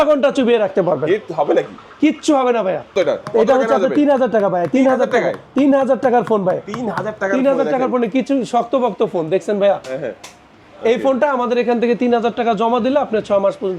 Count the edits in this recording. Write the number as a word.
one